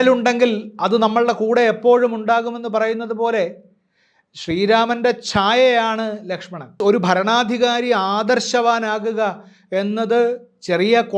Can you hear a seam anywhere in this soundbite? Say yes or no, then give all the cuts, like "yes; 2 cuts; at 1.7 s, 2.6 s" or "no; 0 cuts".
yes; 1 cut; at 6.8 s